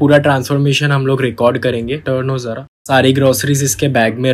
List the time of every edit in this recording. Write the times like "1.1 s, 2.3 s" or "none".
none